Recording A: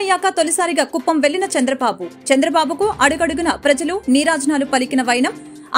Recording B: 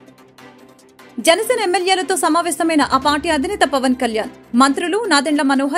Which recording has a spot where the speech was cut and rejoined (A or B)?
B